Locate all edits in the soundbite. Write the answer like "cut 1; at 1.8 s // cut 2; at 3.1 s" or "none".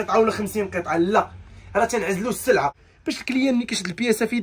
cut 1; at 2.8 s

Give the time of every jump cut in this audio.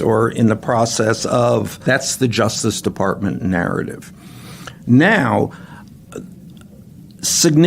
cut 1; at 1.8 s

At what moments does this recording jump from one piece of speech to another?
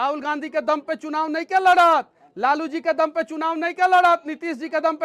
none

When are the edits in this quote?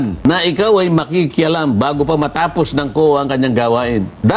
none

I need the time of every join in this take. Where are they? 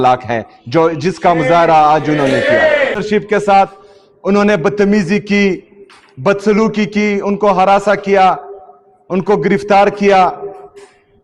cut 1; at 3.0 s

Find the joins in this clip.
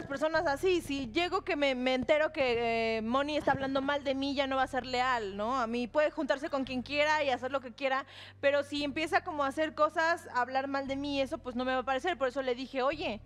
cut 1; at 9.5 s

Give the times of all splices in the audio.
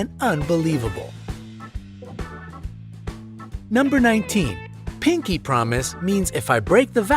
cut 1; at 3.5 s

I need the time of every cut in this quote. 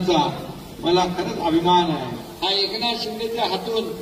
cut 1; at 2.2 s

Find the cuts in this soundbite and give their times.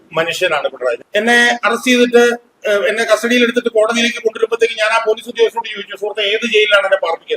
cut 1; at 1.0 s

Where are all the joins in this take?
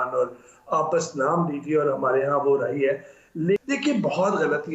none

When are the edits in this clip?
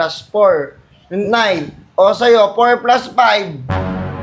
none

